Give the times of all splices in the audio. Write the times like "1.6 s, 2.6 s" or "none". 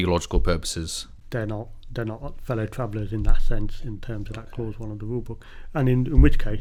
none